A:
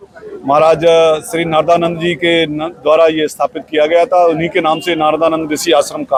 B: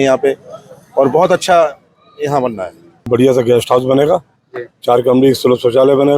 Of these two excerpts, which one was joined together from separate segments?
B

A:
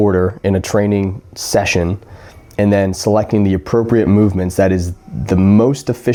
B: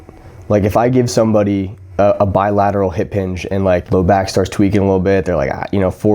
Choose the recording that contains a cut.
B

